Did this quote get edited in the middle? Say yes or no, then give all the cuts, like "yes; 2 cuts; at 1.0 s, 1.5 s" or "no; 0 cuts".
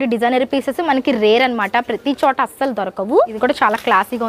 yes; 1 cut; at 3.3 s